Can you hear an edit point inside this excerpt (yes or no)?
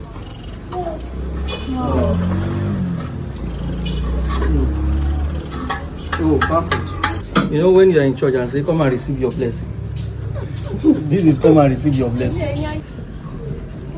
yes